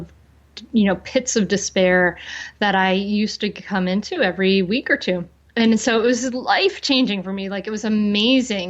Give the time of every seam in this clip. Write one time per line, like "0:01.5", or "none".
0:05.4

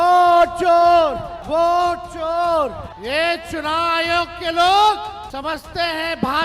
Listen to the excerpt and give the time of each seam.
0:01.3
0:02.9
0:05.2

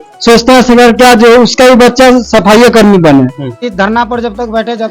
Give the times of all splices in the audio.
0:03.7

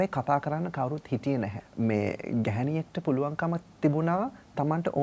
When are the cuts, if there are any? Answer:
0:01.6

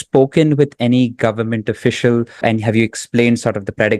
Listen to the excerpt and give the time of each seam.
0:02.4

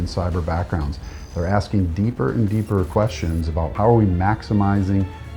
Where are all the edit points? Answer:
0:03.7

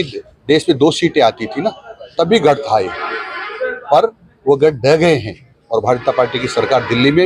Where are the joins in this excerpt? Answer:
none

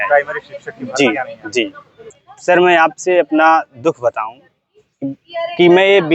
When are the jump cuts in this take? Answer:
none

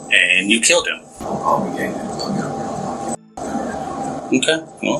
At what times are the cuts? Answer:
0:01.1

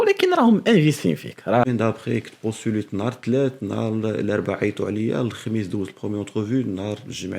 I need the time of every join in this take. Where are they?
0:01.7

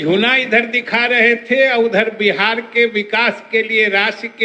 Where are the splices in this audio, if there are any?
none

